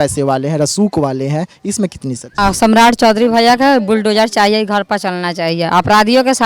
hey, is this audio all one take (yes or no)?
no